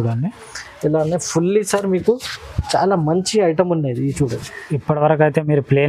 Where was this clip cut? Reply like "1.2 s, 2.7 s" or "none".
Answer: none